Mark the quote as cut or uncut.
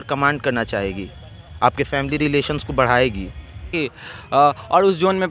cut